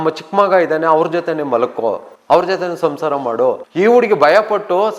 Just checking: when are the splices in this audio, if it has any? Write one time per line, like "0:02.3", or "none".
0:02.1
0:03.6